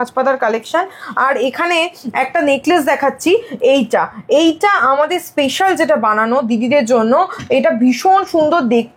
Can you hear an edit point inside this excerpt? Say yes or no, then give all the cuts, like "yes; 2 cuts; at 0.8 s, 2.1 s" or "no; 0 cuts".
no; 0 cuts